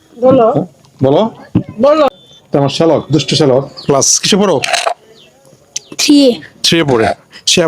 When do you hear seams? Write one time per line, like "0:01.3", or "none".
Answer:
0:02.1